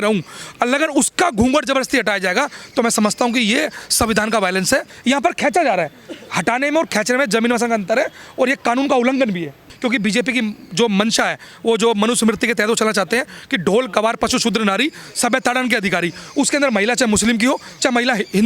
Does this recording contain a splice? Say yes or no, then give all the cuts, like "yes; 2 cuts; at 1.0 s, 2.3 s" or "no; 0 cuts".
yes; 2 cuts; at 4.9 s, 9.7 s